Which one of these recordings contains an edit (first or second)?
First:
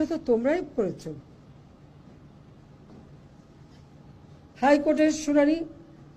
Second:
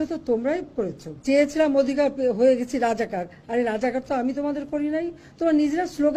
second